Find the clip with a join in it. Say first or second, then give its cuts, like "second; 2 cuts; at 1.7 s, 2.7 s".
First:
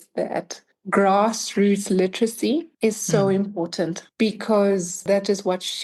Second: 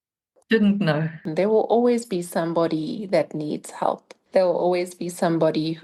second; 1 cut; at 1.2 s